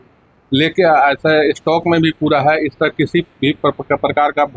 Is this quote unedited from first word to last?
yes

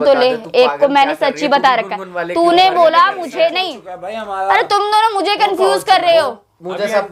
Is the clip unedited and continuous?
yes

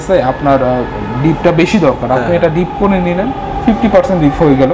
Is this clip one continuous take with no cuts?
yes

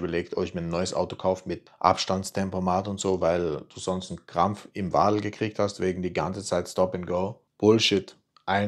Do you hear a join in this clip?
no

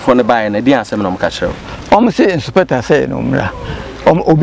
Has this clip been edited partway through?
no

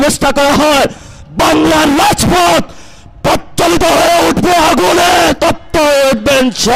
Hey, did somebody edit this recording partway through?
no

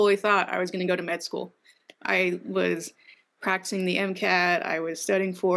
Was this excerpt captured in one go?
yes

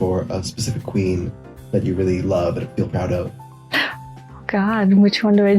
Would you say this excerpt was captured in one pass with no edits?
no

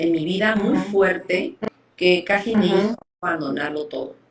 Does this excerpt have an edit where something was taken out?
no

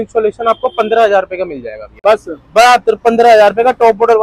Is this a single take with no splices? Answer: yes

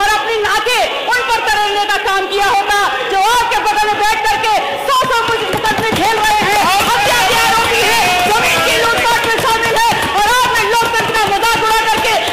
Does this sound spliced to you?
no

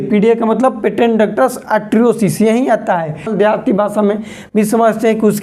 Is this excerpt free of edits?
no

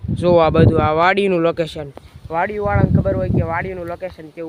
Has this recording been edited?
no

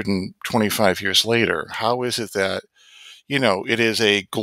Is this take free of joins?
no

